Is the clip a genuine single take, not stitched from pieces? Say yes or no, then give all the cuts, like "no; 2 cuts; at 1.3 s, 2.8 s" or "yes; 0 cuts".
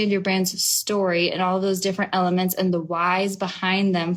yes; 0 cuts